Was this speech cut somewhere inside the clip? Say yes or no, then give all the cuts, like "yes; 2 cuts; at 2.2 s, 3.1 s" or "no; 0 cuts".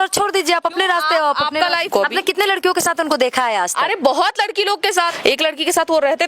yes; 2 cuts; at 1.9 s, 5.1 s